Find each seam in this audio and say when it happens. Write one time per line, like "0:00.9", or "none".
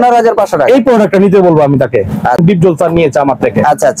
0:02.4

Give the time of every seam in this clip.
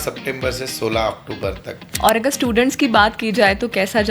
0:01.8

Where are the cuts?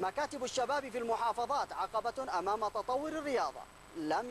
none

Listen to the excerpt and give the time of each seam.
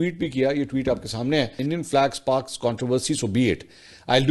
0:01.6

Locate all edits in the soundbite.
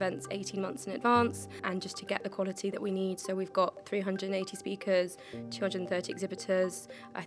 0:01.6

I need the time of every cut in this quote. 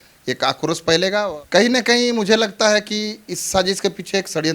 0:01.3

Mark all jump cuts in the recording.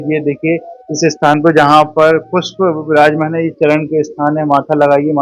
none

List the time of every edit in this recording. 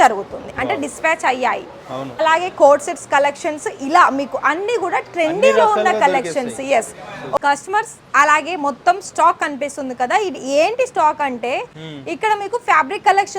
0:02.2
0:07.4

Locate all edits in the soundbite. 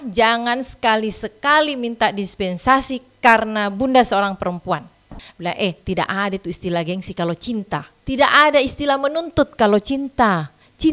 0:05.3
0:07.9

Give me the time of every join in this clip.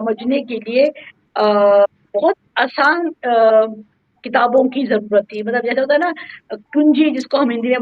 none

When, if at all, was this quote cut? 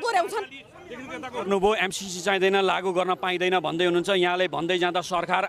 0:01.3

